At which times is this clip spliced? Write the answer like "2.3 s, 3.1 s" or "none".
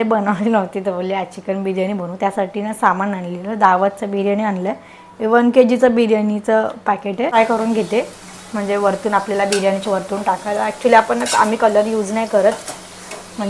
7.3 s